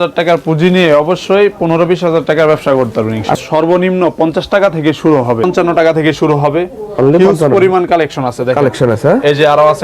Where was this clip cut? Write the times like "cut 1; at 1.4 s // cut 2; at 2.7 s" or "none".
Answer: cut 1; at 3.3 s // cut 2; at 5.4 s